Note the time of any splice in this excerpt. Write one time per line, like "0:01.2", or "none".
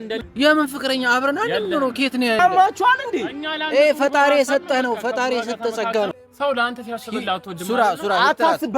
0:02.4
0:06.2